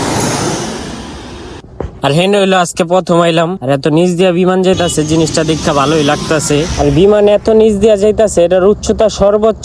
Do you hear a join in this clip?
no; 0 cuts

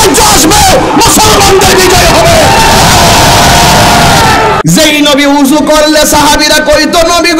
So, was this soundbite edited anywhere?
yes; 1 cut; at 4.6 s

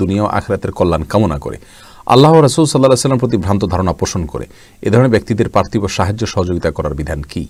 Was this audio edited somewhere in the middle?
no; 0 cuts

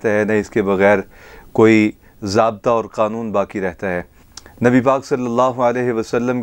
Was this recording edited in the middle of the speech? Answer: no; 0 cuts

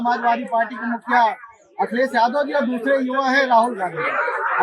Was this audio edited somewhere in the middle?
no; 0 cuts

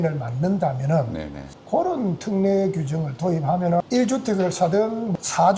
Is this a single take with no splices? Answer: no; 1 cut; at 3.8 s

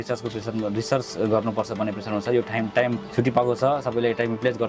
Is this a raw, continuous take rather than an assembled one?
no; 1 cut; at 3.0 s

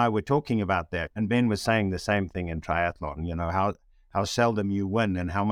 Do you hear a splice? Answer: yes; 1 cut; at 1.0 s

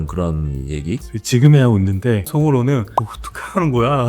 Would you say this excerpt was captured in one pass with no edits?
no; 3 cuts; at 1.1 s, 2.3 s, 2.9 s

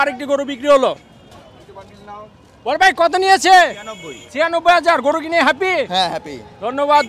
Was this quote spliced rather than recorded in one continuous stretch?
no; 0 cuts

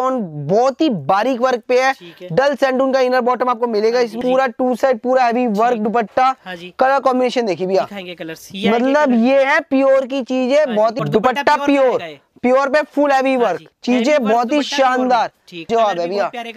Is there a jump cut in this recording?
yes; 3 cuts; at 4.2 s, 11.0 s, 15.7 s

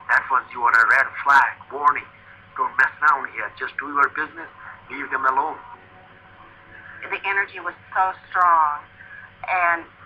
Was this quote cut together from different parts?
yes; 1 cut; at 7.9 s

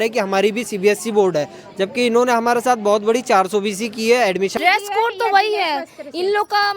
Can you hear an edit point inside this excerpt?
yes; 1 cut; at 4.5 s

